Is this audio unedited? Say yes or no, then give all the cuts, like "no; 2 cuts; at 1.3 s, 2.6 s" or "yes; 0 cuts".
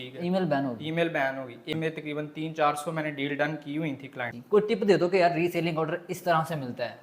no; 2 cuts; at 1.7 s, 4.3 s